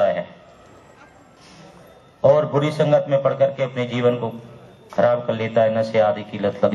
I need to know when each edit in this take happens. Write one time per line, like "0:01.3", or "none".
none